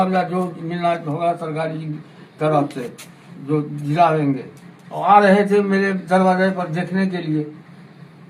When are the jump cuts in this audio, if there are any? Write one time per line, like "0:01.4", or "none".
none